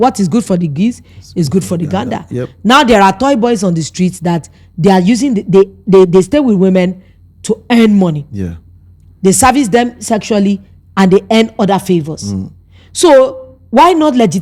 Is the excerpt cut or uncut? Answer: uncut